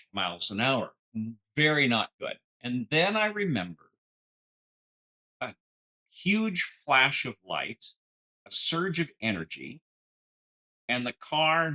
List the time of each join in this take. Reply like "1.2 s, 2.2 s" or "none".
none

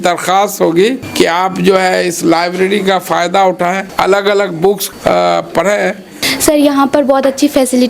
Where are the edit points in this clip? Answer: 1.0 s, 3.9 s, 4.9 s, 6.2 s

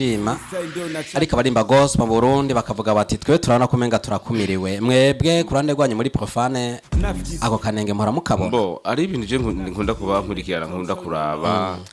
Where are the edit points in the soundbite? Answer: none

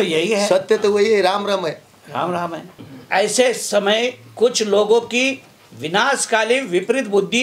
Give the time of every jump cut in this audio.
2.9 s

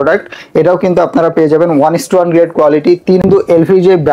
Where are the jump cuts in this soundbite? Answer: 3.2 s

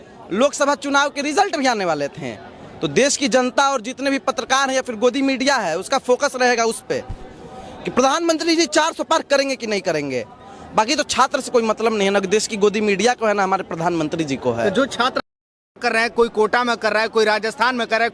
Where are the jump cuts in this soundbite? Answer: none

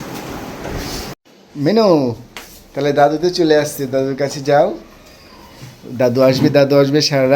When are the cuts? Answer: 1.0 s

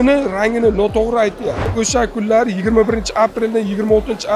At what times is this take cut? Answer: 1.6 s

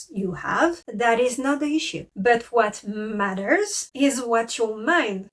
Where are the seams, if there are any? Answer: 2.0 s

